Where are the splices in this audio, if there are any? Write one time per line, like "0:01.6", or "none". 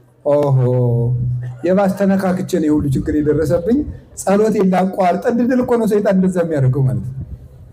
none